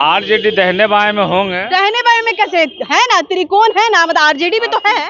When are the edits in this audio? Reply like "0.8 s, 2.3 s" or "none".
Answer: none